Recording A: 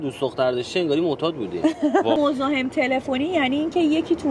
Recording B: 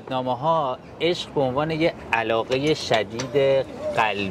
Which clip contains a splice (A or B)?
A